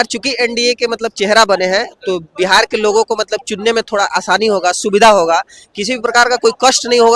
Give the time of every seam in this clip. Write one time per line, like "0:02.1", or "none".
none